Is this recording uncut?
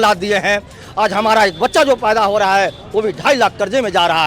yes; 0 cuts

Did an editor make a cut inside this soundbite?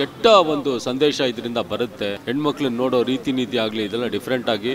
yes; 1 cut; at 2.2 s

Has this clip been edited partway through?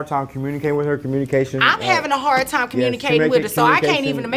no; 0 cuts

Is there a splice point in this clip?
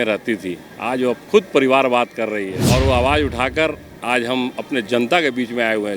yes; 1 cut; at 2.6 s

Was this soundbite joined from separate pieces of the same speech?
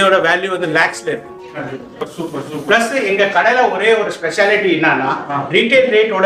yes; 1 cut; at 2.1 s

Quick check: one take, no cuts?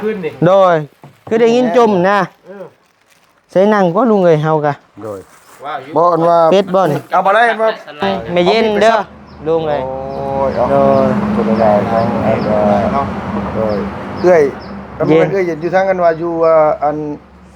no; 1 cut; at 8.0 s

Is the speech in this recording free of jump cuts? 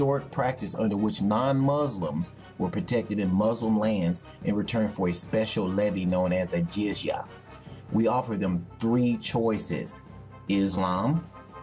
no; 1 cut; at 5.7 s

